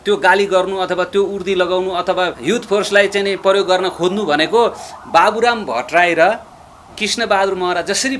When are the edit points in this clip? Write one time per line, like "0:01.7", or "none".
0:02.4